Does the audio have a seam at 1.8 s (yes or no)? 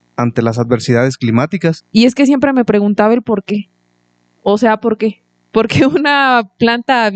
yes